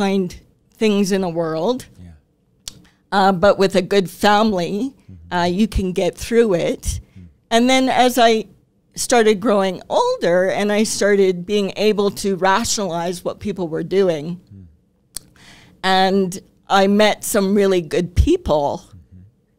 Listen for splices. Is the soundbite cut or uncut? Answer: uncut